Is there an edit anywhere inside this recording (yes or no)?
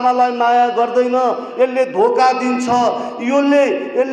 no